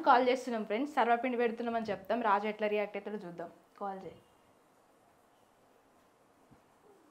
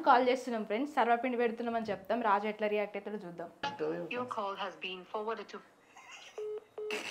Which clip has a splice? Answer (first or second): second